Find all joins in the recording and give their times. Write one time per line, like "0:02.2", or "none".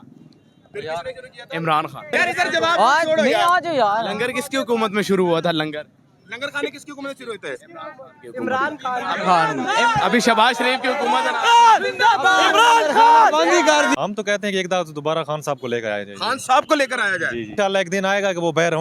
0:02.1
0:14.0
0:17.5

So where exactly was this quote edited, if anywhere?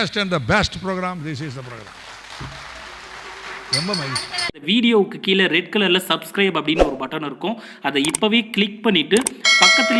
0:04.6

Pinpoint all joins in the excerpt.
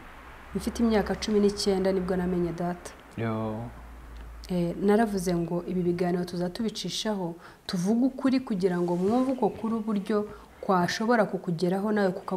none

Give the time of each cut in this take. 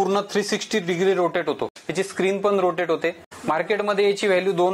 0:01.8
0:03.2

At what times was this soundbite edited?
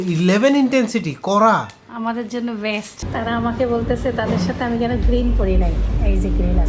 0:01.8
0:03.0

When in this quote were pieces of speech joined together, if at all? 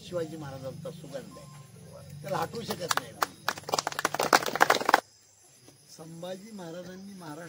0:05.0

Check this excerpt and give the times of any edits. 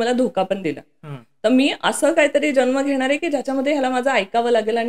none

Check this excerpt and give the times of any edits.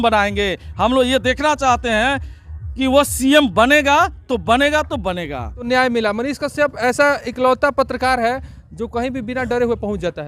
0:06.0

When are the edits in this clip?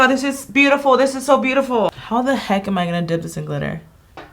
0:02.0

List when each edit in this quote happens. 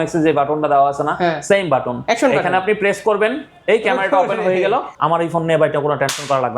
0:04.9

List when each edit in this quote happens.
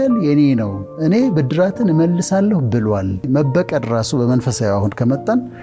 0:03.2

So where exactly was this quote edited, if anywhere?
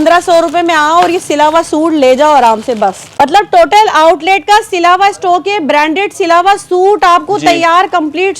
0:03.0

